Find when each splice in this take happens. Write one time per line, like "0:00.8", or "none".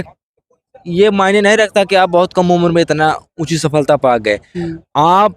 none